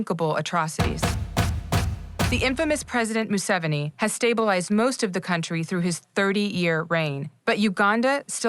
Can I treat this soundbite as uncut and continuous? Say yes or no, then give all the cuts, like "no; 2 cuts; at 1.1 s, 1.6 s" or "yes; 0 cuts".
yes; 0 cuts